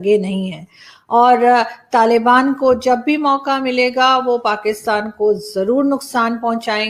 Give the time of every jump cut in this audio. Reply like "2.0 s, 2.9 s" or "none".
none